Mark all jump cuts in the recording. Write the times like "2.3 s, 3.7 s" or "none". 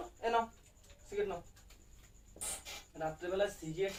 none